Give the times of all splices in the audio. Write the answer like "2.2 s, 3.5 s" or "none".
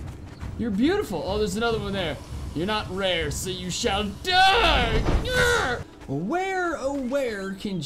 5.9 s